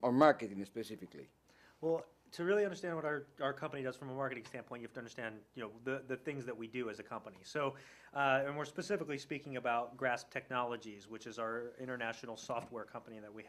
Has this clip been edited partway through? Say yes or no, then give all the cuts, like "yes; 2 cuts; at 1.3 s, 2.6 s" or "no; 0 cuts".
yes; 1 cut; at 10.8 s